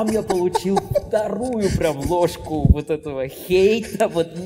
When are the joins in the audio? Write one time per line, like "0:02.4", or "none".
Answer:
none